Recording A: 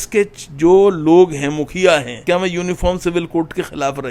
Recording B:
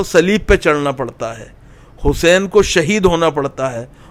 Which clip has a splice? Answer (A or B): A